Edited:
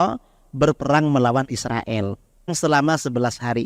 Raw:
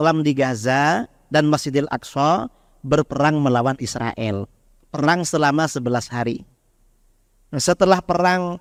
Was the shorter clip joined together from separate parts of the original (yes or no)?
yes